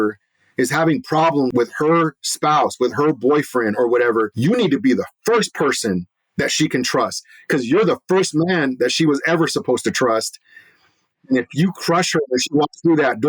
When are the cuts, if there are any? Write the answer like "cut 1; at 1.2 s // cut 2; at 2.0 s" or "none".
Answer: cut 1; at 1.5 s // cut 2; at 4.3 s